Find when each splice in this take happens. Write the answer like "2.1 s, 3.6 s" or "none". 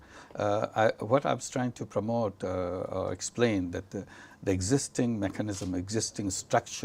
none